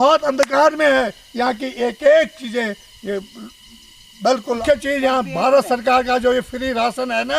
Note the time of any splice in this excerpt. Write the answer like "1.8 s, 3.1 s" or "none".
4.6 s